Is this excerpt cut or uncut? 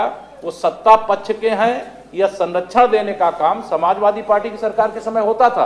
uncut